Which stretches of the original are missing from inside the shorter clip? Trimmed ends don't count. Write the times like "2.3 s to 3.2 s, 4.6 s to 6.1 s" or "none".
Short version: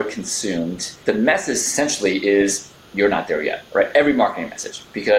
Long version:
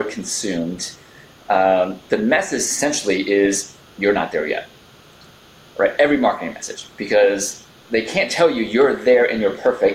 0.9 s to 2.0 s, 4.7 s to 5.7 s